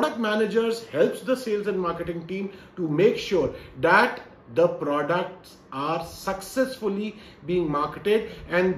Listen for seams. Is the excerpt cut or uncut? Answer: uncut